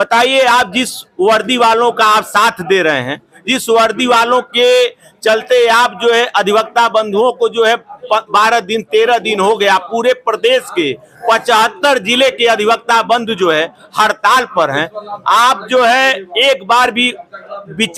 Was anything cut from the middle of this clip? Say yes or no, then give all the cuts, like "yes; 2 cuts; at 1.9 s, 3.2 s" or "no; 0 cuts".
no; 0 cuts